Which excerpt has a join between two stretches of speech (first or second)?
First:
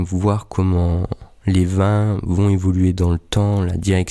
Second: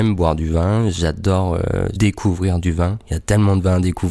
second